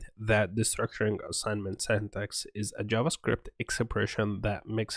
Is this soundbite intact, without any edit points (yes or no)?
yes